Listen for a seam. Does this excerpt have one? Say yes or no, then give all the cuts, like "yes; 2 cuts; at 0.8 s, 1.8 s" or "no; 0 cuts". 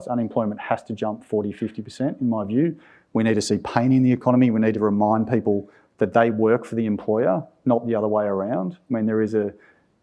yes; 2 cuts; at 4.5 s, 8.7 s